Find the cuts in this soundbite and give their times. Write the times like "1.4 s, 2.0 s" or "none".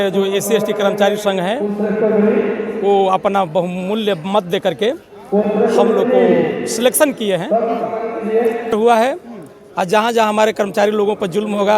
8.7 s